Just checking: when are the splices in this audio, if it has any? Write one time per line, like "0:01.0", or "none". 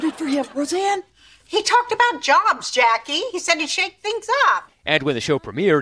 none